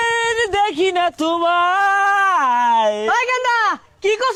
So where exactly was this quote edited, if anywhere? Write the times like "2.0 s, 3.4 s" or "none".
none